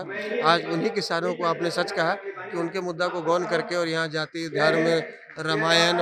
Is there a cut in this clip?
no; 0 cuts

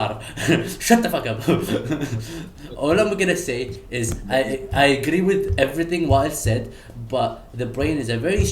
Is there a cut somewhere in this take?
no; 0 cuts

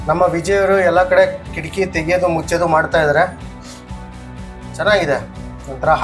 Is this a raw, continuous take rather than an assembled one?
yes; 0 cuts

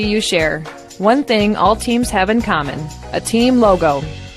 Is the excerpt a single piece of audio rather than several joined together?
no; 1 cut; at 2.2 s

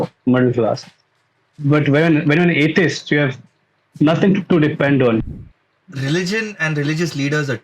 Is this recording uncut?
no; 1 cut; at 5.2 s

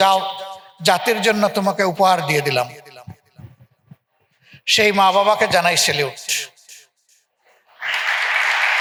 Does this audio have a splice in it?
no; 0 cuts

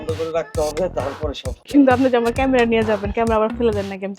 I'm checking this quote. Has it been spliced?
yes; 1 cut; at 1.7 s

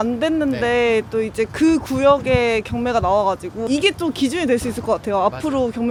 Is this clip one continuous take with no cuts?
yes; 0 cuts

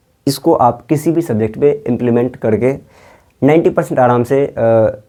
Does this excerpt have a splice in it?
no; 0 cuts

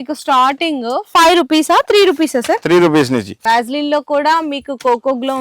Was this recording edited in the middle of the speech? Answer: yes; 1 cut; at 3.3 s

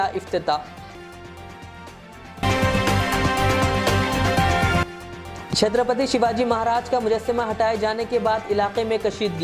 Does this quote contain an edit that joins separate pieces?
no; 0 cuts

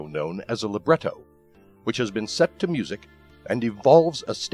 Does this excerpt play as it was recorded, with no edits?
yes; 0 cuts

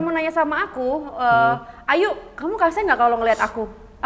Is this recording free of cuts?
yes; 0 cuts

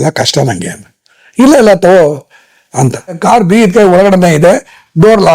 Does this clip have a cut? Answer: yes; 1 cut; at 3.2 s

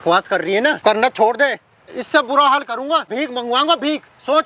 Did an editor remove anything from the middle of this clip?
yes; 3 cuts; at 0.8 s, 1.9 s, 3.1 s

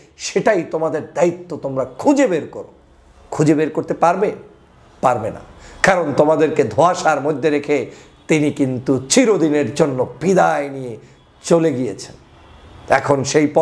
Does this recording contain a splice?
no; 0 cuts

